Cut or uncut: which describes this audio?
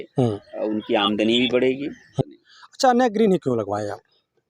cut